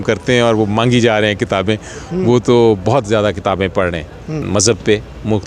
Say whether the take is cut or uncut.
cut